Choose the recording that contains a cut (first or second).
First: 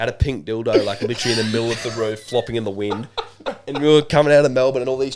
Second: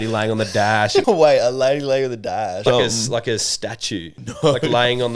second